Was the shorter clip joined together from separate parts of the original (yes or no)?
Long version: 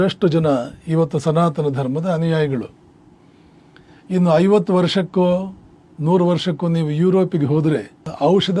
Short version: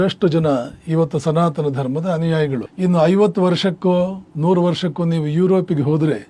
yes